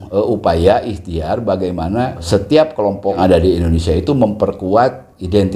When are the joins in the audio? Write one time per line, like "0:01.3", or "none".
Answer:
0:02.2
0:03.2

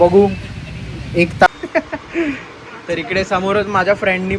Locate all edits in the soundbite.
0:01.5

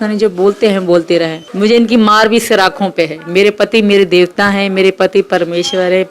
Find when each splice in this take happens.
0:01.4

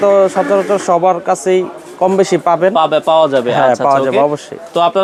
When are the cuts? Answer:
none

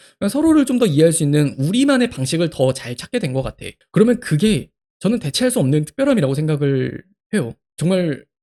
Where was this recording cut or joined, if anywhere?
none

